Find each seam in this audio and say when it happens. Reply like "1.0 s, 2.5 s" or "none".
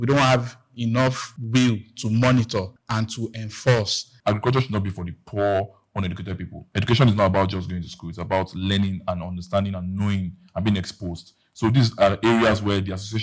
1.3 s, 2.8 s, 4.0 s